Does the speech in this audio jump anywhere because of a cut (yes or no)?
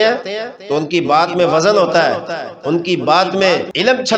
no